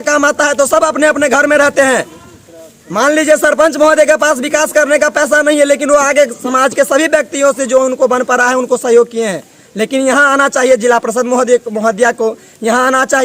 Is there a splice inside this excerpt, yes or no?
no